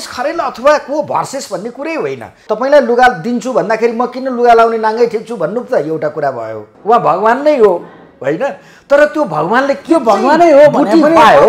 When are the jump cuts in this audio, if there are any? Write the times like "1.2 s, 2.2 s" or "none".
2.3 s, 6.7 s